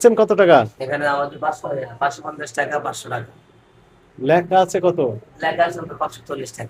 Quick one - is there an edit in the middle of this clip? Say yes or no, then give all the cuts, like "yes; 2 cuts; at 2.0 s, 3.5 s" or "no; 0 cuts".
no; 0 cuts